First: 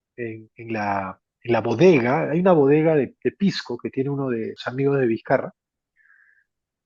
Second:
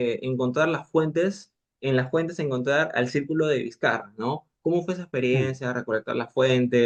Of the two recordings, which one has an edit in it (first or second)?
first